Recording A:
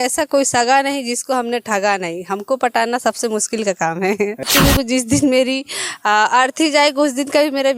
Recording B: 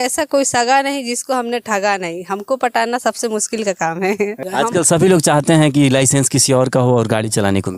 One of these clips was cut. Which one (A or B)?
A